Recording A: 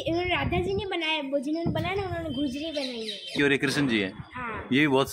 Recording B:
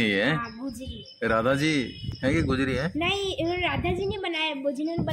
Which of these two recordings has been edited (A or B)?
A